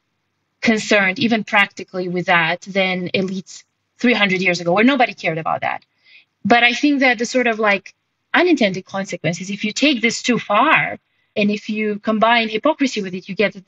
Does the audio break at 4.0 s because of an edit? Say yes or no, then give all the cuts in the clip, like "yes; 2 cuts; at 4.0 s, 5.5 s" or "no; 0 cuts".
no; 1 cut; at 11.3 s